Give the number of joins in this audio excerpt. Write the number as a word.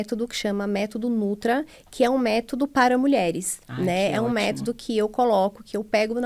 zero